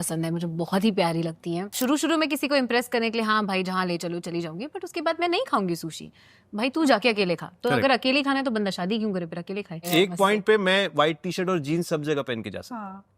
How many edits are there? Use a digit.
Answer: 2